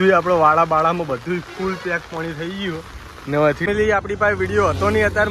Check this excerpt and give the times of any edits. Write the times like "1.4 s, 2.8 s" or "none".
3.6 s